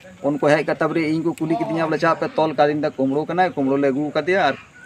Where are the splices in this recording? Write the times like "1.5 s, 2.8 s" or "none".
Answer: none